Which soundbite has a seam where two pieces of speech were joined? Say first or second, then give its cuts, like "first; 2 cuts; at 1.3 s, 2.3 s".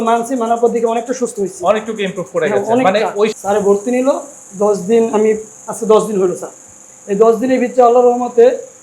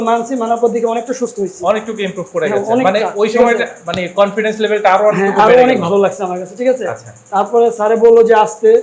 first; 1 cut; at 3.3 s